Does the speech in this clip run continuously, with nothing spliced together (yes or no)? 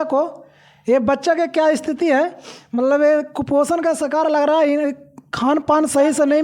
yes